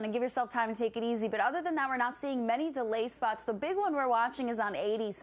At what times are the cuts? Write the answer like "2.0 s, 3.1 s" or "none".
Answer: none